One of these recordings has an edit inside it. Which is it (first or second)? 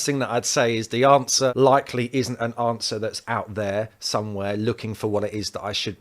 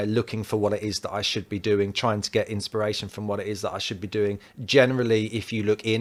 first